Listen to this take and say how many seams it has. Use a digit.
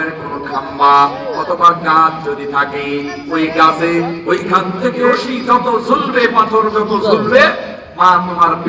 1